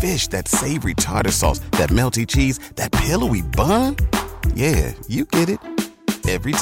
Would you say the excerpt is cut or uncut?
uncut